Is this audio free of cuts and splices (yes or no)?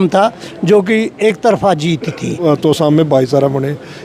no